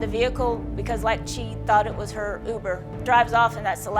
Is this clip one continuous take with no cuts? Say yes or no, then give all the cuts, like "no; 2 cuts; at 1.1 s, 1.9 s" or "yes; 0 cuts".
no; 1 cut; at 2.9 s